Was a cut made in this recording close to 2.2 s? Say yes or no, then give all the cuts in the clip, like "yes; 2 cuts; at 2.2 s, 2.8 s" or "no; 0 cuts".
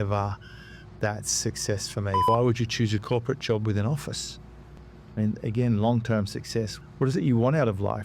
yes; 2 cuts; at 2.2 s, 6.7 s